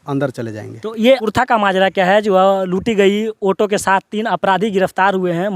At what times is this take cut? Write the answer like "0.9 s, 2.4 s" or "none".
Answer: 1.3 s